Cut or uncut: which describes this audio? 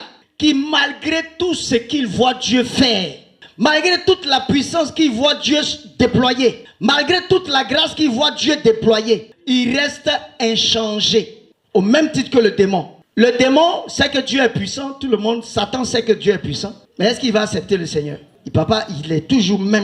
uncut